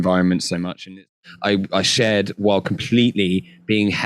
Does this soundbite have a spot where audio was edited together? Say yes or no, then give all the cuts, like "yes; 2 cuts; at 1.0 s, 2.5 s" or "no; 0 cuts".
yes; 1 cut; at 1.1 s